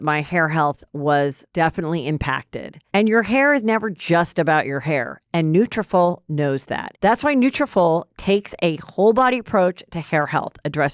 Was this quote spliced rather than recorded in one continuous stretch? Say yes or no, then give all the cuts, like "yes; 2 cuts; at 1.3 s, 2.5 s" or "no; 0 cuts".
yes; 1 cut; at 6.9 s